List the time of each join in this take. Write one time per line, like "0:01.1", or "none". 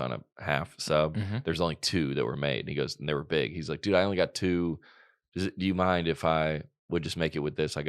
none